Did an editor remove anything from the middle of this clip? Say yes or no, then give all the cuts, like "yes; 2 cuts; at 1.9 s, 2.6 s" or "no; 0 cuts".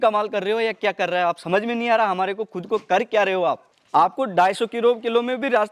yes; 1 cut; at 3.7 s